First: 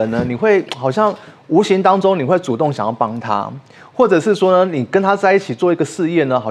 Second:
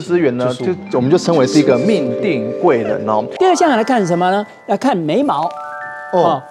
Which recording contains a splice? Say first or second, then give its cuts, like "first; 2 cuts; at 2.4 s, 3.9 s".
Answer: second; 1 cut; at 3.3 s